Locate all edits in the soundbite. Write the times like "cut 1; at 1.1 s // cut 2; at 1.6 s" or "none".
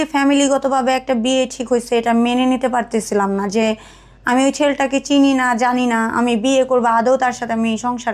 none